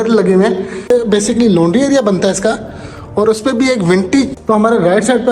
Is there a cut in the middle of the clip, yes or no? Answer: yes